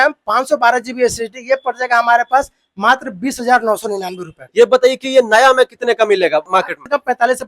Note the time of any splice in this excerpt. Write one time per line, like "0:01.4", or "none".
0:04.4
0:06.5